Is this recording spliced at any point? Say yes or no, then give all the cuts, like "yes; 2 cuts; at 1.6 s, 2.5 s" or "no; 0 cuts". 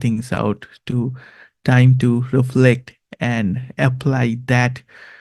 no; 0 cuts